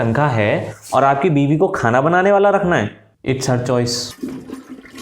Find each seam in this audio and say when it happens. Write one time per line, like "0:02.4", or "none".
0:04.1